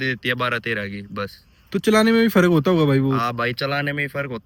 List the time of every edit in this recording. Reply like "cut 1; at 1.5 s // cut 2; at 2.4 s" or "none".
none